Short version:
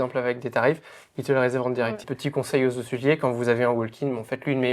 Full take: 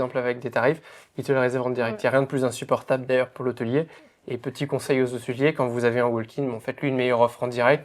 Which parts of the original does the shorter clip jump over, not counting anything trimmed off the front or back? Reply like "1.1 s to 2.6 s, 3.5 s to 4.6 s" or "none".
2.0 s to 4.3 s